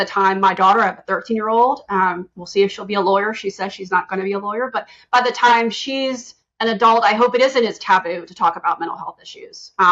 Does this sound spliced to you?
no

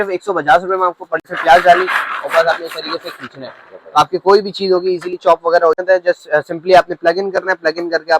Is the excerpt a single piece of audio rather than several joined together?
no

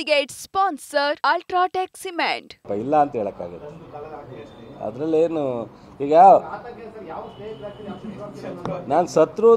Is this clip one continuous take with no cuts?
no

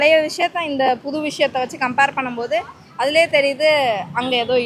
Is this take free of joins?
yes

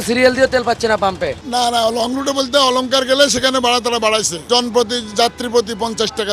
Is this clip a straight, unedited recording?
no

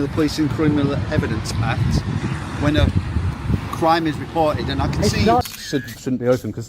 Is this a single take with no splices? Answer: no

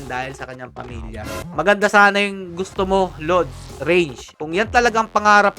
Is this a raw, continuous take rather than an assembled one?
no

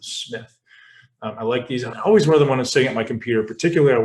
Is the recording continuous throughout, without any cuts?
no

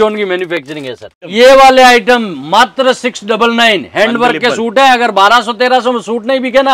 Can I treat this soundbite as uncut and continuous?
no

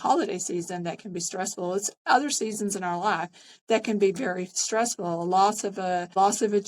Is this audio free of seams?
yes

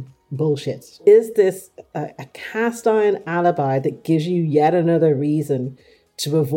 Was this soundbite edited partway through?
yes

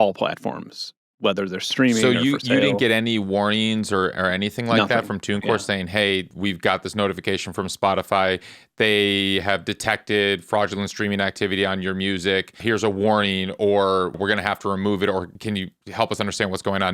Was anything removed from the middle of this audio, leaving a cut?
yes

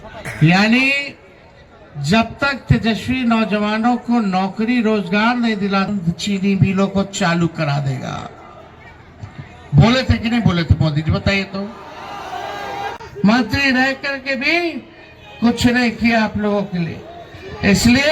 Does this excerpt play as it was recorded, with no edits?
no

